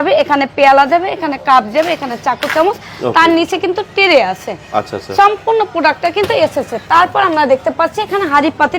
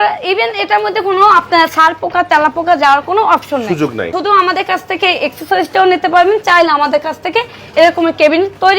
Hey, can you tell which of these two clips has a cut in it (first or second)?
second